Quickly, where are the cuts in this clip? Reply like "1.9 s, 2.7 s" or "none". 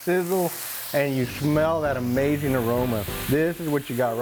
none